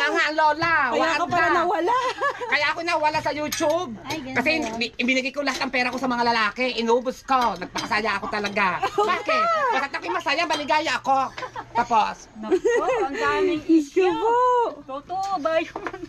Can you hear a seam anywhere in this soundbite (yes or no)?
no